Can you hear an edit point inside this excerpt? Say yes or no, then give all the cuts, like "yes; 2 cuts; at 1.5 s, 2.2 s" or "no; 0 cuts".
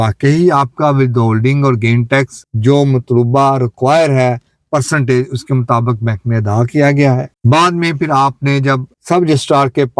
no; 0 cuts